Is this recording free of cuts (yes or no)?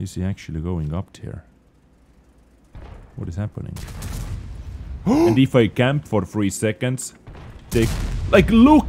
no